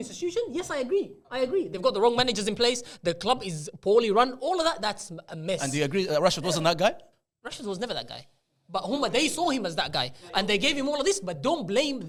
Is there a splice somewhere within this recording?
no; 0 cuts

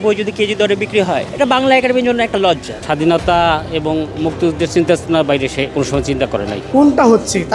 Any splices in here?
yes; 3 cuts; at 1.3 s, 2.7 s, 6.1 s

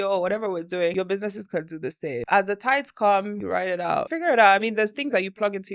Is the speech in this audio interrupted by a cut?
yes; 3 cuts; at 0.9 s, 2.2 s, 4.0 s

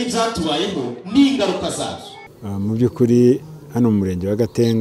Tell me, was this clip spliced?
yes; 1 cut; at 2.3 s

